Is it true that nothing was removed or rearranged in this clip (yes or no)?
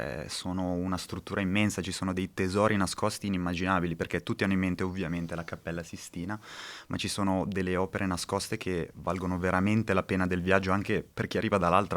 yes